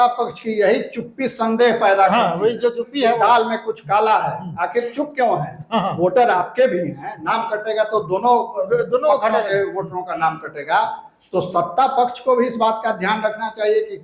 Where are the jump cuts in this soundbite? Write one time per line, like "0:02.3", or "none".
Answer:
none